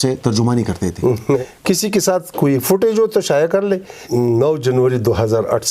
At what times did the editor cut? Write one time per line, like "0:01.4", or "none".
0:01.4
0:03.9